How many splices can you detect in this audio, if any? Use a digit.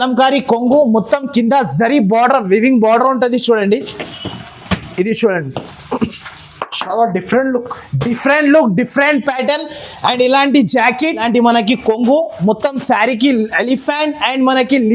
1